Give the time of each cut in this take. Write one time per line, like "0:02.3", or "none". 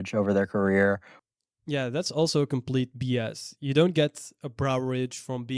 0:01.1